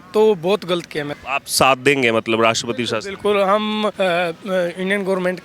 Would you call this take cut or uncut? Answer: cut